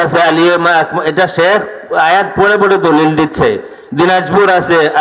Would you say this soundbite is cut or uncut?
uncut